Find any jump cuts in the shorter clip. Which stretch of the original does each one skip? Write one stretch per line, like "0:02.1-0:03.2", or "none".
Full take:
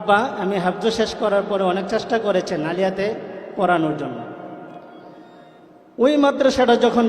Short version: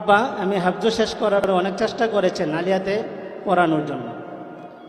0:01.4-0:01.5